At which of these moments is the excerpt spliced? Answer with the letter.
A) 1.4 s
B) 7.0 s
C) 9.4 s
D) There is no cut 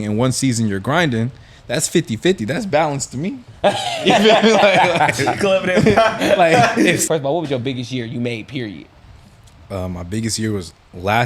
B